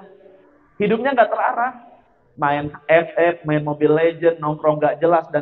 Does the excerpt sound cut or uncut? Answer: uncut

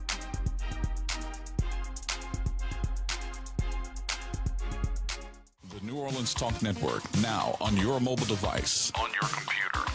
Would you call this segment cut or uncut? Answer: cut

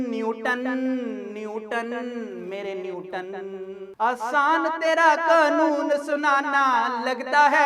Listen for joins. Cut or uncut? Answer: uncut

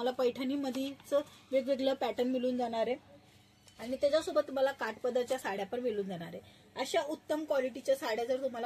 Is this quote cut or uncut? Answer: uncut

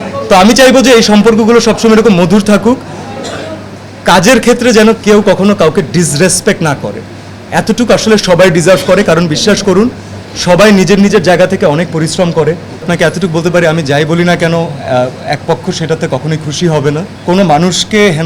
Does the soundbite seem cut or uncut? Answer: cut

